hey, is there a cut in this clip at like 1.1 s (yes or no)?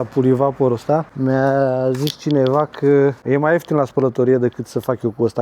yes